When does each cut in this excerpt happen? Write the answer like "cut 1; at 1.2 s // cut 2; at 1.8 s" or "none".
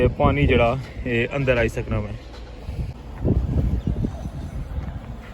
cut 1; at 3.0 s